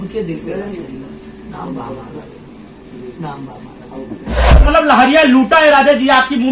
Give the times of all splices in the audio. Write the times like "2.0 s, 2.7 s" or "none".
4.7 s

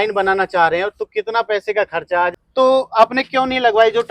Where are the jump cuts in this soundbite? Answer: 2.3 s

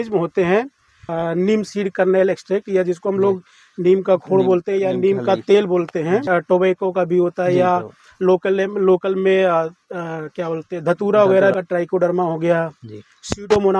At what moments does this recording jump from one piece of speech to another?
1.1 s, 6.3 s, 11.5 s

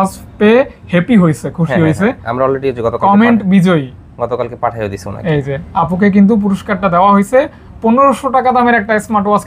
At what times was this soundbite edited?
none

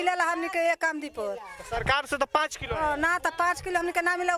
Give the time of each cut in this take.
none

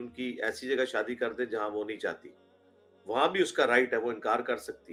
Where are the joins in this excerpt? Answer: none

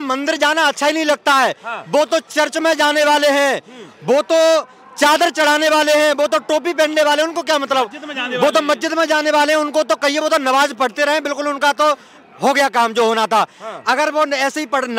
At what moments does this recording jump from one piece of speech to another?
none

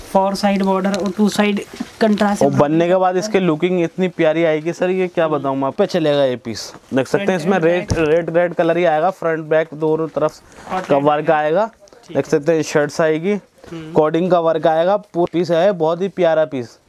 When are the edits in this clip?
5.7 s, 15.2 s

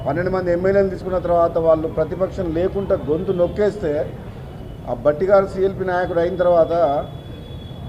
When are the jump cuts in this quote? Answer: none

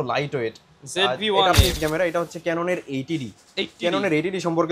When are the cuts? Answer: 1.8 s

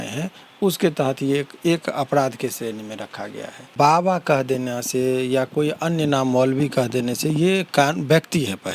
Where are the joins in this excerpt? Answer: 3.7 s

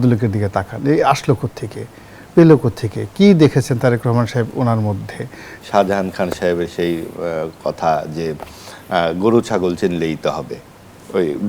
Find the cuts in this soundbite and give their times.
5.5 s

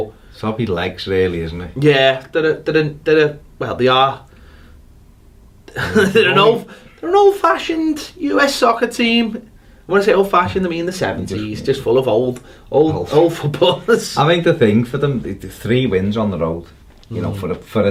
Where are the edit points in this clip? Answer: none

